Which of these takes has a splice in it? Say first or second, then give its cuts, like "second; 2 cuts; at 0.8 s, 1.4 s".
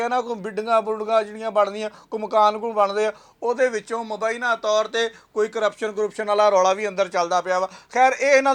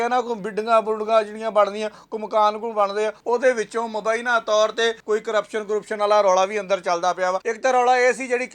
second; 3 cuts; at 3.2 s, 5.0 s, 7.5 s